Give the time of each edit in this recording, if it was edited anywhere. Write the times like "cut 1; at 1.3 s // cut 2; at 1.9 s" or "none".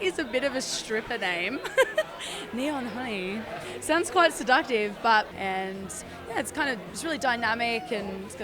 cut 1; at 5.3 s